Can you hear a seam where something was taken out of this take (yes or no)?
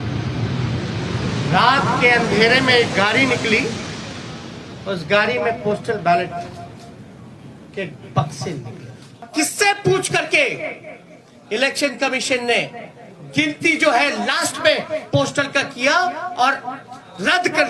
yes